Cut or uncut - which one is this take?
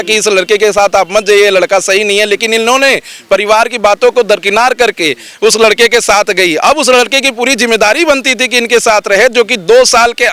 uncut